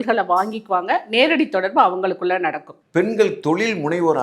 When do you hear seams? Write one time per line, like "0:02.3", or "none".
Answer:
none